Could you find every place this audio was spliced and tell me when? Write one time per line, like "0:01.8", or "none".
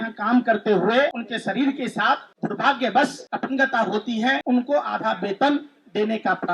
0:01.3
0:02.3
0:03.3
0:04.4